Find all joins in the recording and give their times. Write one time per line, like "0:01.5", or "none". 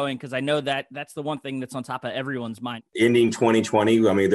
0:02.8